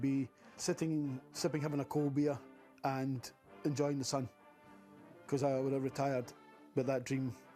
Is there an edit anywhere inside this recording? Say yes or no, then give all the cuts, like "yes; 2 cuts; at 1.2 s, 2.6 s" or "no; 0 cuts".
no; 0 cuts